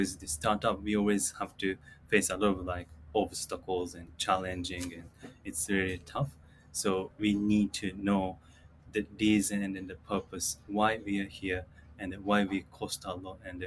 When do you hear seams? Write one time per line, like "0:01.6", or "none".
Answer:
none